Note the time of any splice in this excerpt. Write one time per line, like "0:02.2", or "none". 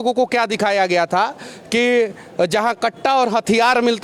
none